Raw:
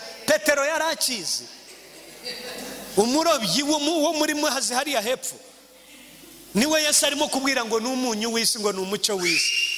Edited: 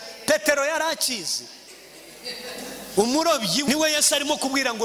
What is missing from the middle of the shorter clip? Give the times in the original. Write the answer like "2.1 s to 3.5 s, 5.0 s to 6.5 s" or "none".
3.7 s to 6.6 s